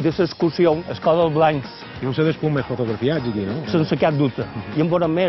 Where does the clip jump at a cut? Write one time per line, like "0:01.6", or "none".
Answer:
0:00.8
0:01.8
0:03.6